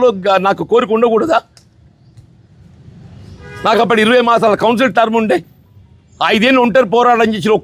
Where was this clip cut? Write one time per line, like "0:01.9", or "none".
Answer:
none